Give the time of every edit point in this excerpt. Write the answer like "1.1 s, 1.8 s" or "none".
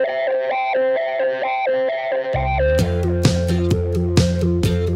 none